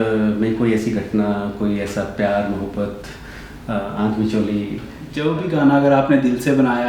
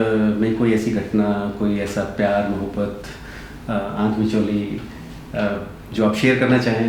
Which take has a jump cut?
first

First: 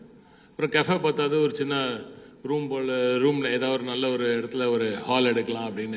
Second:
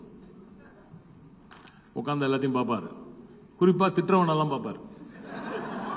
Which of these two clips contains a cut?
first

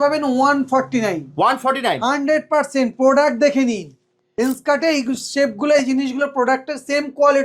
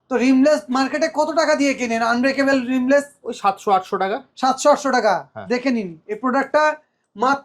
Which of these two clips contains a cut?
first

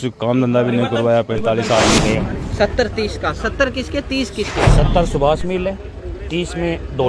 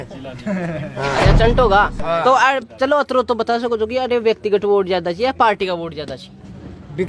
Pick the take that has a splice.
first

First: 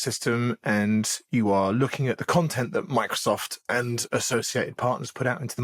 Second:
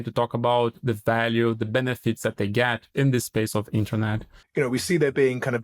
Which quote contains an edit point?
second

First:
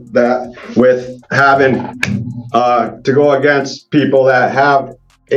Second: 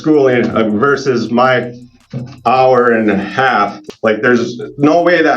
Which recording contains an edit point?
second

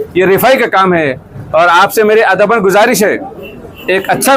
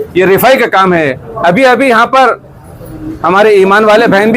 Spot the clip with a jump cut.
second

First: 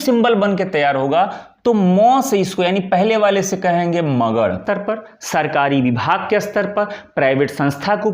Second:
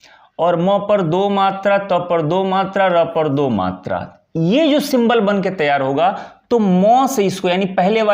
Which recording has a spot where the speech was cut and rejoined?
first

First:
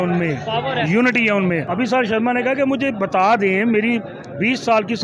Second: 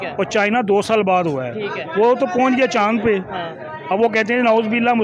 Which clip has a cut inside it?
first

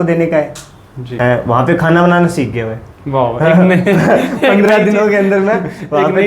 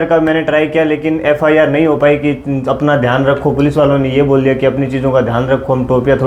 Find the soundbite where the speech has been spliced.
first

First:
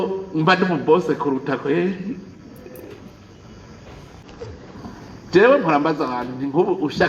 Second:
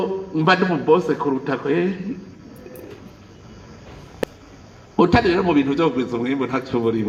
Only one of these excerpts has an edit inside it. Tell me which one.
first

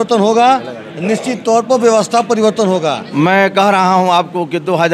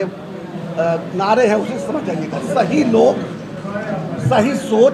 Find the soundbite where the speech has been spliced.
first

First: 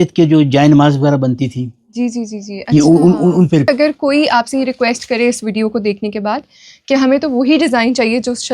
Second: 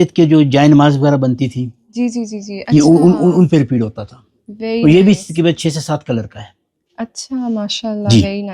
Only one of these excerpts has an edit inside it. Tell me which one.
first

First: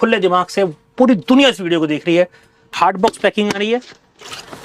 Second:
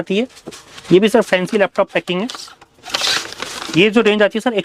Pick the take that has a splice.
first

